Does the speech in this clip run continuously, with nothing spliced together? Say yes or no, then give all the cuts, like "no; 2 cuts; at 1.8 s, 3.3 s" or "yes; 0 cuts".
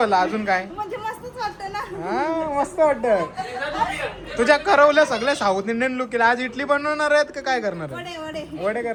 yes; 0 cuts